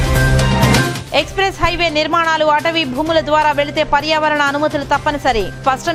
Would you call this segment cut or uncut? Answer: uncut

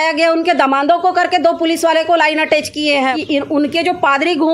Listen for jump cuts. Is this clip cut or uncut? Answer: cut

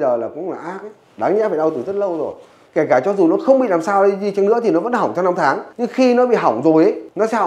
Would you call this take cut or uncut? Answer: cut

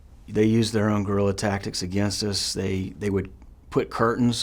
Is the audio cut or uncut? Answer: cut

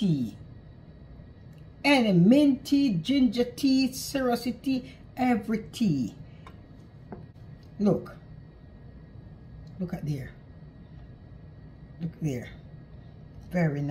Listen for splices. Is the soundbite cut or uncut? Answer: cut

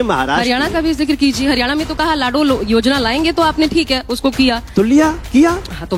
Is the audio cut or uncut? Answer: uncut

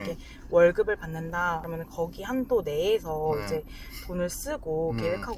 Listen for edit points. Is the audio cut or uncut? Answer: cut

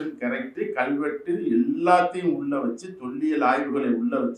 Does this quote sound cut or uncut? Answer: uncut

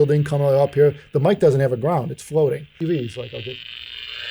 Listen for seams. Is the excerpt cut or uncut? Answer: cut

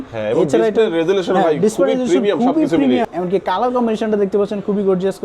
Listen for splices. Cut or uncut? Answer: cut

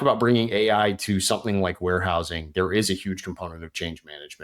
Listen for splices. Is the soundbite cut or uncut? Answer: uncut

